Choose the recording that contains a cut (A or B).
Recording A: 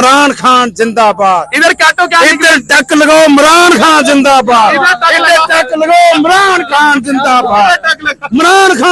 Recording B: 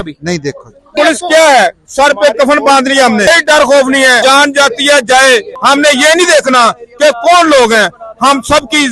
B